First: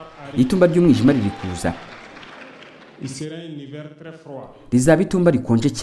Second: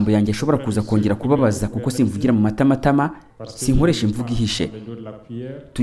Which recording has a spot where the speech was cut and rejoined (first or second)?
first